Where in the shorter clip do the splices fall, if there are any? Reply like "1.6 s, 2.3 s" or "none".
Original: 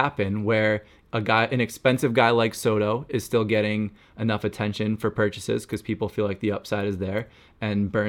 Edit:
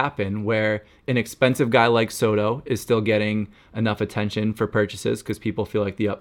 1.1 s